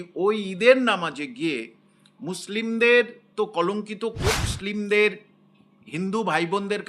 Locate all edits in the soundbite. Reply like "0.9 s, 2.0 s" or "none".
4.5 s